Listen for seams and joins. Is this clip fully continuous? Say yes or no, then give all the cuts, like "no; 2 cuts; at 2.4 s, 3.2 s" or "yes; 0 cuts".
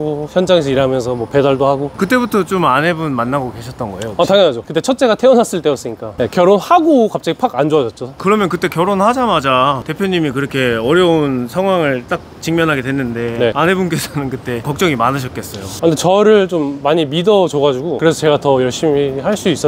yes; 0 cuts